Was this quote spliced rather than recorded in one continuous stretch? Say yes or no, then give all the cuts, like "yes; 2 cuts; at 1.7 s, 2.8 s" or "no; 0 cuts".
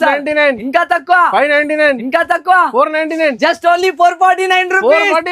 no; 0 cuts